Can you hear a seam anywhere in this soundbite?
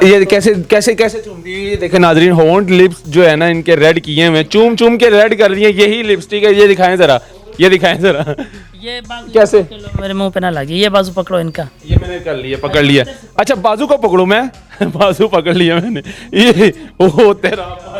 no; 0 cuts

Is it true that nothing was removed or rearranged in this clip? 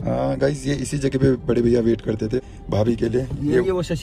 no; 1 cut; at 2.4 s

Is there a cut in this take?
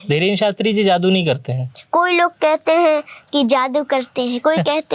no; 0 cuts

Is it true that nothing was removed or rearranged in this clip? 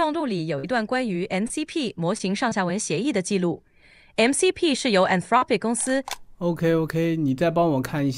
no; 1 cut; at 6.1 s

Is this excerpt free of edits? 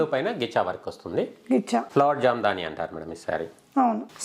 yes; 0 cuts

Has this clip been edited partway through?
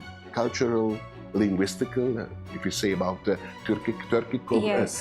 no; 0 cuts

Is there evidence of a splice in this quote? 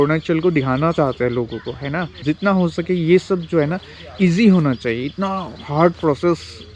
yes; 1 cut; at 2.2 s

